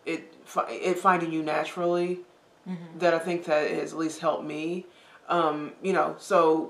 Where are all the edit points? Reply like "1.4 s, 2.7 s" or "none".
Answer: none